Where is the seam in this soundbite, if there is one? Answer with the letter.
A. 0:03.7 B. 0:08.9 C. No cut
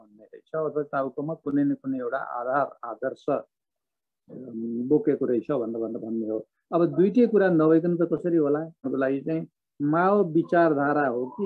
B